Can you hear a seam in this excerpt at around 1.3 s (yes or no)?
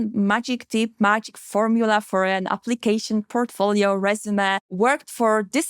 no